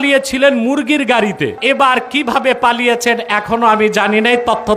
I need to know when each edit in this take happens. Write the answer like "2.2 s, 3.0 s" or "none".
1.6 s